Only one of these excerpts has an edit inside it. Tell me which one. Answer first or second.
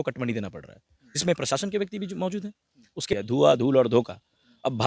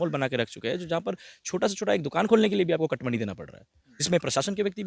first